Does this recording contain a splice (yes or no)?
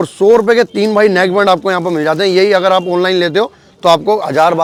no